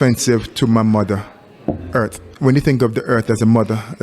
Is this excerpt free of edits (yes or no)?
no